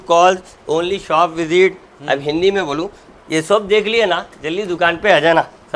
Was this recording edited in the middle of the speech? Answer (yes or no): no